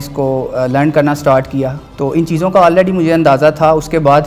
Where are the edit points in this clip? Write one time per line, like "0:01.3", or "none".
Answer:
0:01.8